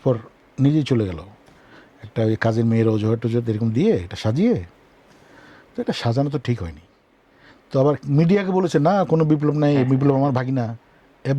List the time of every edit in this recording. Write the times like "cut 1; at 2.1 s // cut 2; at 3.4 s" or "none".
none